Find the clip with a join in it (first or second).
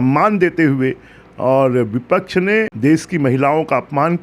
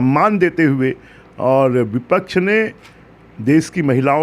first